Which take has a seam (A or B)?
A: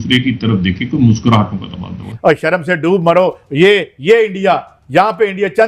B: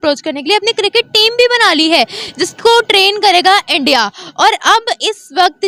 A